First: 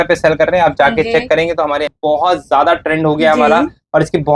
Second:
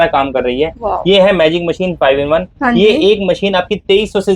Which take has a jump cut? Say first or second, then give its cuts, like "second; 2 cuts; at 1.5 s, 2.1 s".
first; 1 cut; at 1.9 s